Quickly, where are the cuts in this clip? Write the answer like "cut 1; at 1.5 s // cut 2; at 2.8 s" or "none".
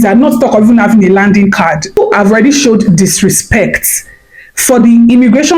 cut 1; at 2.0 s